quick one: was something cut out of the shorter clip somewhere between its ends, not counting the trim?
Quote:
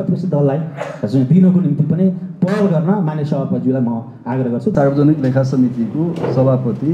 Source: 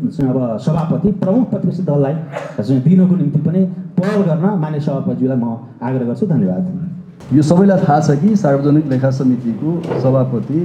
yes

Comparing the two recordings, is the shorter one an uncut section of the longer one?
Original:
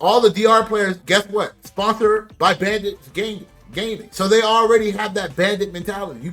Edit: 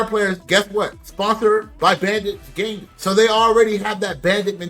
no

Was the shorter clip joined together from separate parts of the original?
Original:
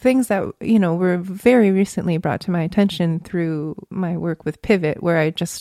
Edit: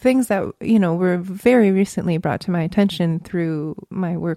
no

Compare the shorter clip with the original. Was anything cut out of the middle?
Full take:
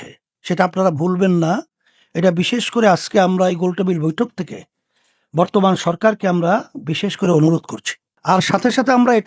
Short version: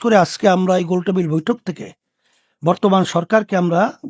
no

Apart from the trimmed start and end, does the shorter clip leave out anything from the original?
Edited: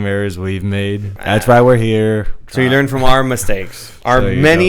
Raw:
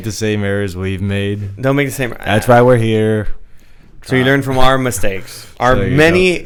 yes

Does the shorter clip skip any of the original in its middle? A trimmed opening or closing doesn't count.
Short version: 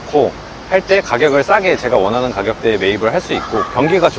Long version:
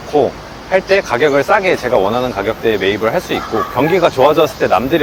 no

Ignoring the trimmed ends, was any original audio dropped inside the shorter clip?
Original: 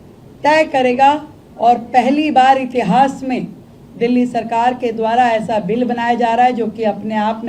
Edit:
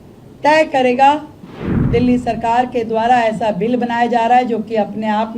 yes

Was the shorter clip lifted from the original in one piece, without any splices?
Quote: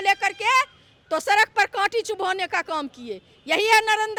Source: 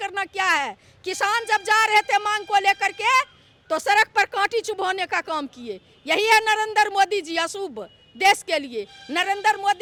yes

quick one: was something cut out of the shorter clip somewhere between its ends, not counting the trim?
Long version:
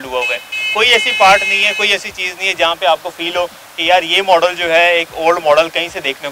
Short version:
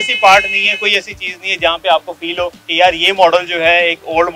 yes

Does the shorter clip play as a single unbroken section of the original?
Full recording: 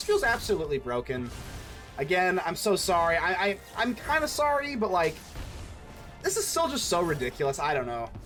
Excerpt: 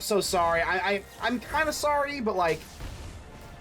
yes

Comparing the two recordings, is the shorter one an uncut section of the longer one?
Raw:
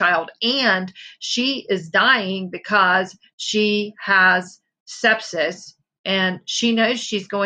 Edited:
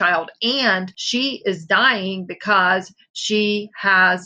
no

